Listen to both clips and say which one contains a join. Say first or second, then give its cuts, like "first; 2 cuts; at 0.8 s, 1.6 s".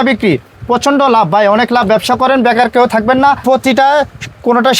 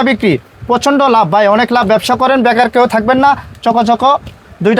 first; 1 cut; at 3.4 s